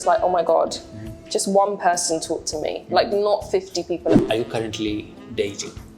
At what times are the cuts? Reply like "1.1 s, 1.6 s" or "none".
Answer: 4.2 s

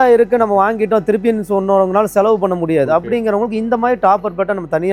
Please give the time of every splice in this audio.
none

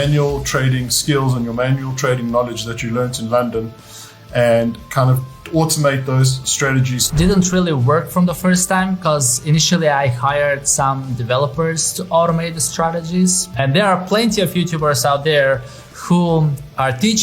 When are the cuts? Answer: 7.1 s, 13.5 s

